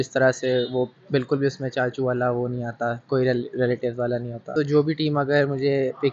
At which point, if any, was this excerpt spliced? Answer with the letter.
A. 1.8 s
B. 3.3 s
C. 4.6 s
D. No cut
C